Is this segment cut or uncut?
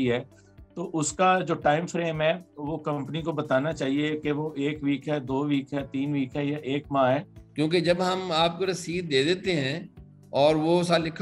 cut